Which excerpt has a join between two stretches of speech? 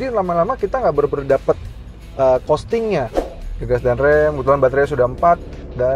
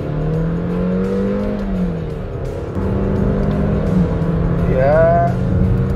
first; 1 cut; at 3.1 s

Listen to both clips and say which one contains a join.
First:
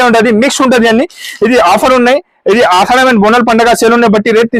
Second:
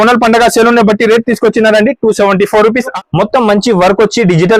second; 1 cut; at 2.9 s

